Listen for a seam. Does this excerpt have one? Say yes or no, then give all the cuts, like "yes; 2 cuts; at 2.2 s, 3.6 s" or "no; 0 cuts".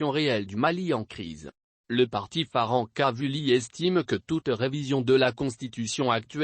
yes; 1 cut; at 1.3 s